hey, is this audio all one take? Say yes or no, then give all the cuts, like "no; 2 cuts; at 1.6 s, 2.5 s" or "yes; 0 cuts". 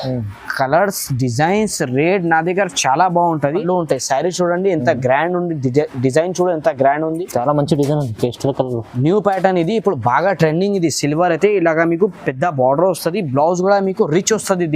no; 1 cut; at 3.6 s